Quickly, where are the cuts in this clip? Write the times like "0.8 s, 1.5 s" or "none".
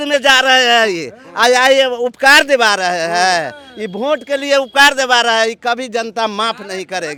none

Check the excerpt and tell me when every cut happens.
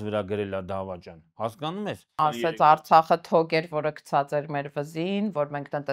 2.1 s

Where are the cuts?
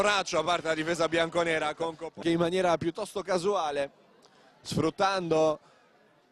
none

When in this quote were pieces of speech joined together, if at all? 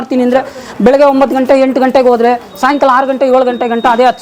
none

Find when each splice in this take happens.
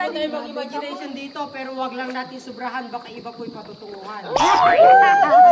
none

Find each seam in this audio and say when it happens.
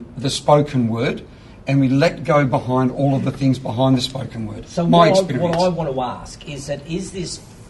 none

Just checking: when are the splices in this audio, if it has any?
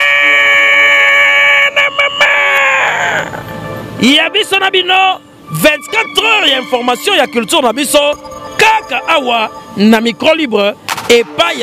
none

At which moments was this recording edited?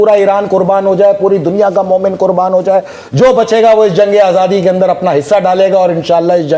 none

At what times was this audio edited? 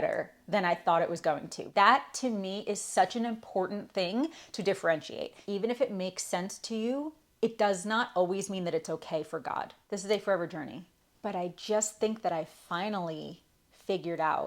1.5 s, 5.4 s, 9.8 s

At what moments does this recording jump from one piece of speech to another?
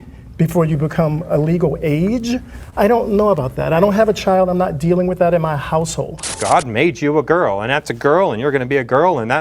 6.3 s

